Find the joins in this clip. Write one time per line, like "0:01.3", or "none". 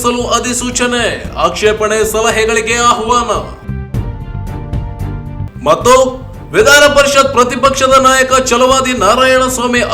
none